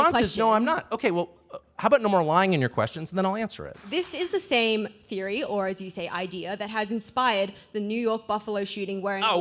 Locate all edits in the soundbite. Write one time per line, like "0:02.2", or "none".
0:03.8